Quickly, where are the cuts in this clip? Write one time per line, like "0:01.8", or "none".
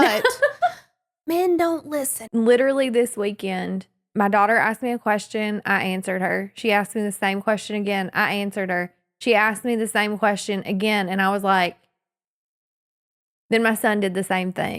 0:02.2